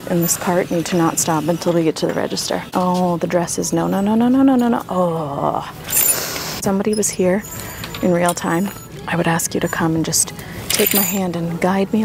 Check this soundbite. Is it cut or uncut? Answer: cut